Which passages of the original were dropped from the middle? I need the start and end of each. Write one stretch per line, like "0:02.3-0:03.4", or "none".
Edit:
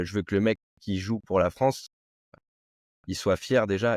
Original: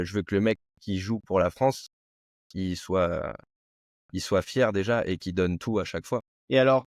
0:02.4-0:03.4